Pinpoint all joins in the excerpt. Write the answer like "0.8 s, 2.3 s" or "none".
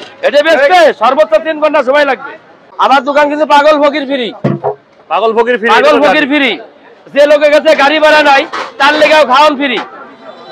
2.6 s